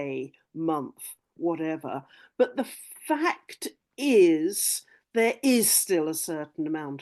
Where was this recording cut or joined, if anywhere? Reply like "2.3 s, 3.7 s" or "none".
none